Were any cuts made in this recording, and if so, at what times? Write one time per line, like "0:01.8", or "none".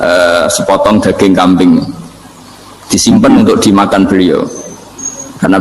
none

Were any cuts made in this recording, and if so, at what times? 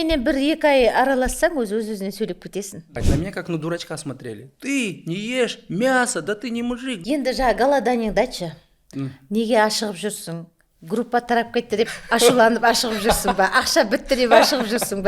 0:02.9
0:07.0
0:12.0

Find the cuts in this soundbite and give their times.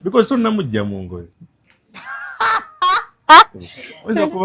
none

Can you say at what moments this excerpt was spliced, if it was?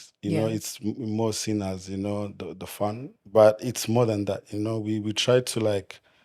0:03.1

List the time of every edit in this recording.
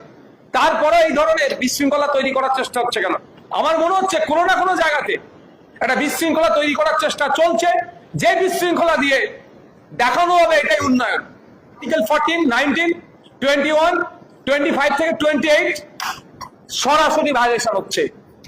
0:11.8

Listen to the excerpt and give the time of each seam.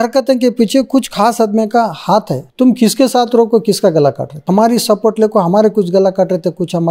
0:02.4
0:04.5

